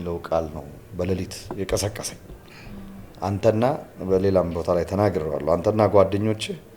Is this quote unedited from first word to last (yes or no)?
yes